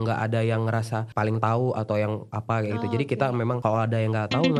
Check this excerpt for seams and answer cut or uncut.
uncut